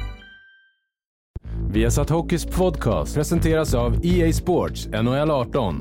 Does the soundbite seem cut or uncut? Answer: cut